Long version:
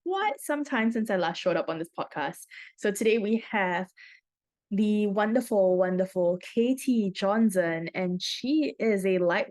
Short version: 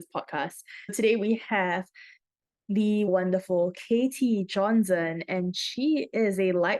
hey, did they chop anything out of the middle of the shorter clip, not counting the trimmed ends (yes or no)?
yes